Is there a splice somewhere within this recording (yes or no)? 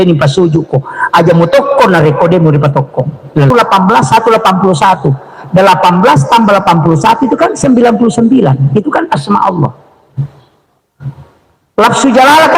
yes